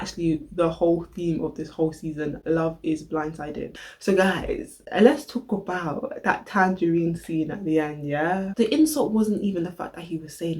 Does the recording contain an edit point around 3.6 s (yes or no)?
yes